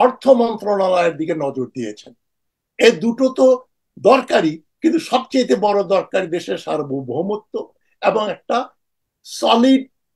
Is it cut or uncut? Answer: uncut